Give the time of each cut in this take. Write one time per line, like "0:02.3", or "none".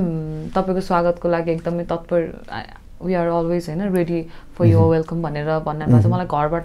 none